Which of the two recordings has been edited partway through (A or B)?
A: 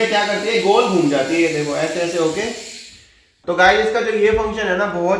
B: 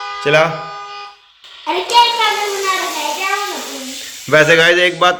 A